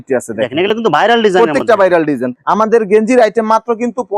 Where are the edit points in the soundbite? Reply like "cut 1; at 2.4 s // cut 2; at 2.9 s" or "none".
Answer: cut 1; at 2.3 s